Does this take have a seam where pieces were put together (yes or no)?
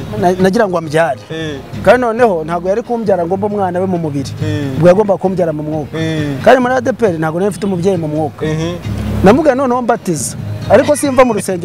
no